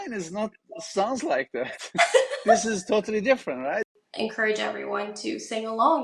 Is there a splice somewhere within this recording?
yes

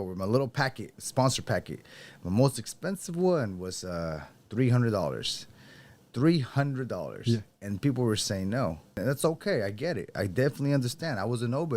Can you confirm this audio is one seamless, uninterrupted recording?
no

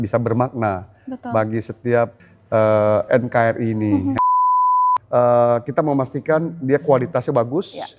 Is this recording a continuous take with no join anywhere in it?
no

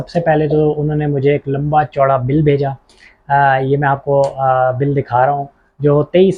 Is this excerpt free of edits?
yes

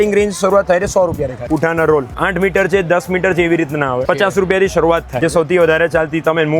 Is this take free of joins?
no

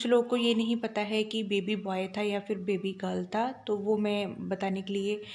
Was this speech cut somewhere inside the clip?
no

